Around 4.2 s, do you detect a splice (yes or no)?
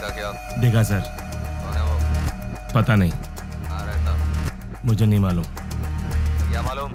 no